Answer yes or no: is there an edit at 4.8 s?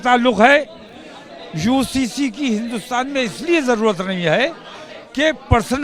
no